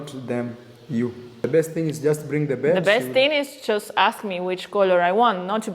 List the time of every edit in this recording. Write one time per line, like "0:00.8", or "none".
0:01.4